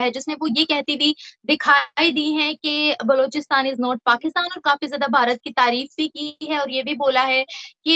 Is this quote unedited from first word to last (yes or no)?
yes